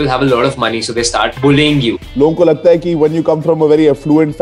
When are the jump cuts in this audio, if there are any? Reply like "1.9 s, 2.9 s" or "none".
1.3 s, 2.1 s